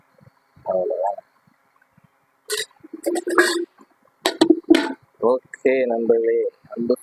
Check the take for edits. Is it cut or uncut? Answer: uncut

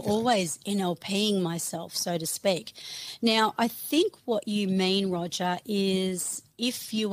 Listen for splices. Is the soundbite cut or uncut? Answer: uncut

